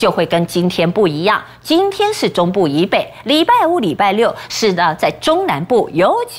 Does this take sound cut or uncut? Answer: uncut